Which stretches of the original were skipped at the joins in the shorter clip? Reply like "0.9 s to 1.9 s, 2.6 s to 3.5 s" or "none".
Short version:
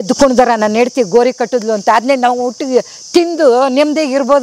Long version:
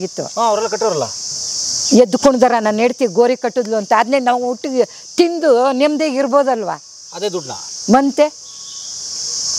none